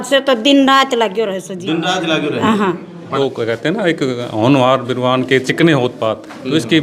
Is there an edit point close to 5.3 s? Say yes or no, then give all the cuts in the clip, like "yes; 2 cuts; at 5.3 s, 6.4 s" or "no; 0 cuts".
no; 1 cut; at 3.1 s